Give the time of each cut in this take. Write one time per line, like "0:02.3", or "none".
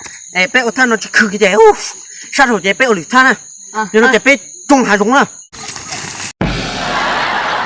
0:05.4